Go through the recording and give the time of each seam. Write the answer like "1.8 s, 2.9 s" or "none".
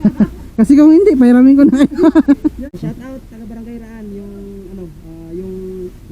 2.8 s